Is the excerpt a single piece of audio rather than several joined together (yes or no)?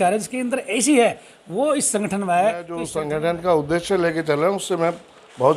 no